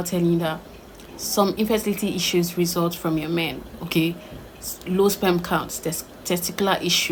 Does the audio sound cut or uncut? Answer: uncut